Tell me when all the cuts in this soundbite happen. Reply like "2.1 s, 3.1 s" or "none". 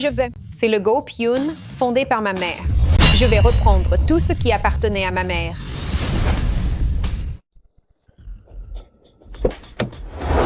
none